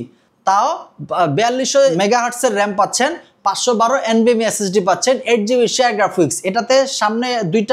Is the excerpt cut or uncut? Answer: cut